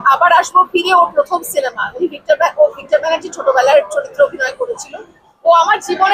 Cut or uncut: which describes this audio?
uncut